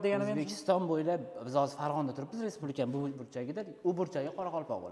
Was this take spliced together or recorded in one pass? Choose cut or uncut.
uncut